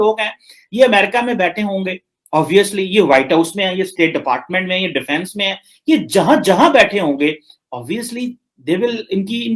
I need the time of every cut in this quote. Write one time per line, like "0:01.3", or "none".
none